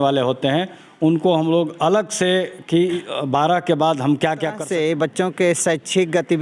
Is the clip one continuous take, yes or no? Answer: no